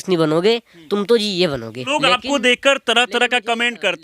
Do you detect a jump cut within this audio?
yes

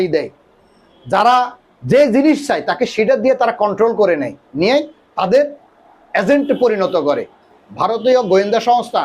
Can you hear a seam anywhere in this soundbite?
yes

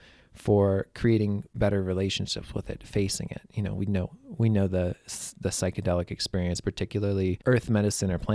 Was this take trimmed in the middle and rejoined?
yes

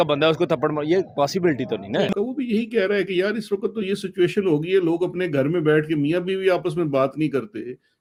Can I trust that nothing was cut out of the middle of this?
yes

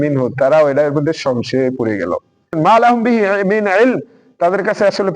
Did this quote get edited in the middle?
yes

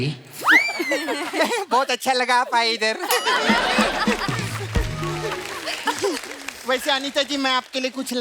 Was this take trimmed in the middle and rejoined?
yes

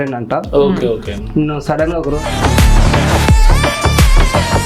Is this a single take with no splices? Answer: no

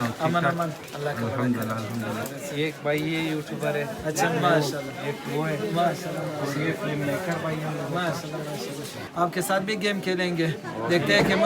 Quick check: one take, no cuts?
no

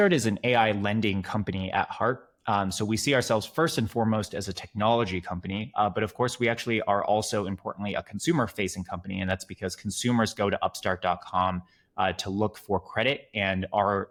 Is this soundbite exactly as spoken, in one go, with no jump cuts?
yes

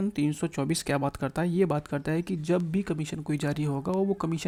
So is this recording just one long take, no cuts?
yes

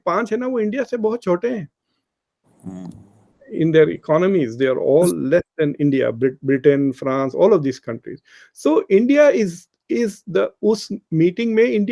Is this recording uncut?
yes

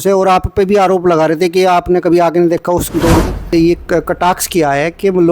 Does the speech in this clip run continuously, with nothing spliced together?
no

